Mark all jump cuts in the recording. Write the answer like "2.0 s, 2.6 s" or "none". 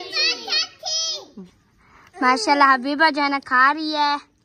1.4 s